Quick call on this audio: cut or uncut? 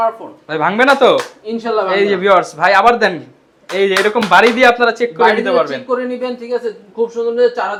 uncut